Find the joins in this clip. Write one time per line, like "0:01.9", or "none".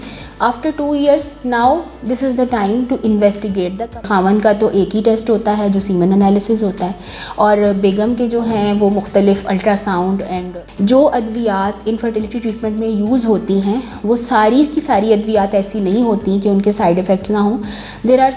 0:04.0
0:10.4